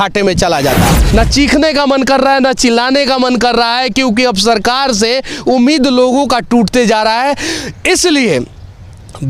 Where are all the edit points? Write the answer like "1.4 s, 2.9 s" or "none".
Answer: 1.0 s